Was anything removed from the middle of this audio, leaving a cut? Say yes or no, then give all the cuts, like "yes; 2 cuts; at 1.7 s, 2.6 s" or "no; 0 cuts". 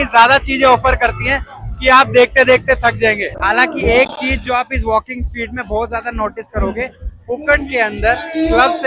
yes; 1 cut; at 3.3 s